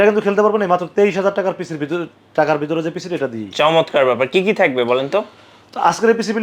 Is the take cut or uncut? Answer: uncut